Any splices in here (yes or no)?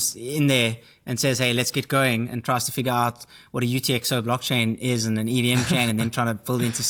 no